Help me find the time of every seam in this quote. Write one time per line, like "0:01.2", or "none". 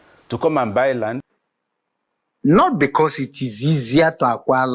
0:01.2